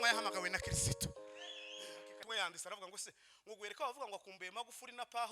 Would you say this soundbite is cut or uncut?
cut